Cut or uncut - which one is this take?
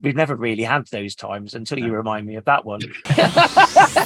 uncut